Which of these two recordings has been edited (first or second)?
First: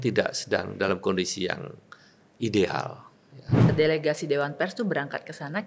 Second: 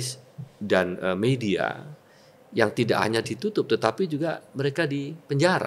first